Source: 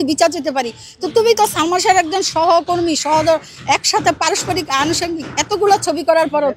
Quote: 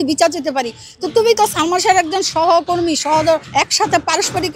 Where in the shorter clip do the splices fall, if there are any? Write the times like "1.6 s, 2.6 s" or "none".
3.5 s